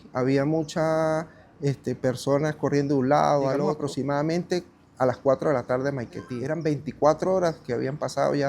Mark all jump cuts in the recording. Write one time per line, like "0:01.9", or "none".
0:03.8
0:06.4